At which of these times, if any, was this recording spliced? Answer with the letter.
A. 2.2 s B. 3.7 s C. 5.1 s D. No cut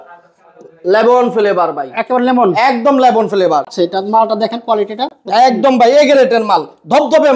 B